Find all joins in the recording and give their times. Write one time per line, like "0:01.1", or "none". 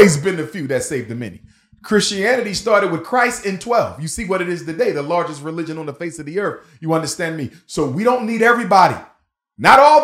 none